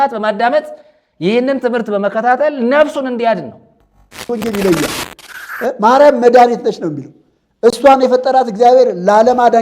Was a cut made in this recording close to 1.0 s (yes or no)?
no